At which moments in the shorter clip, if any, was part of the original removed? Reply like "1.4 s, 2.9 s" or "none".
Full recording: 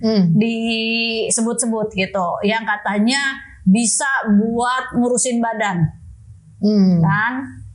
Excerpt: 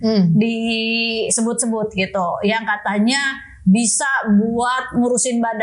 none